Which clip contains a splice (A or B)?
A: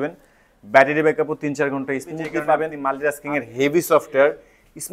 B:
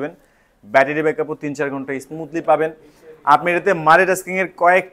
A